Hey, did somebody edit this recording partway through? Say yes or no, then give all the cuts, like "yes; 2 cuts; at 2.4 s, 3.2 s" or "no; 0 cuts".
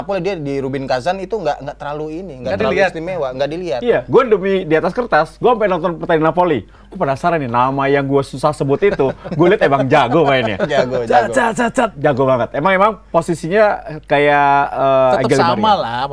no; 0 cuts